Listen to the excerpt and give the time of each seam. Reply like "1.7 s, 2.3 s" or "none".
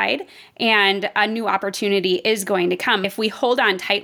3.0 s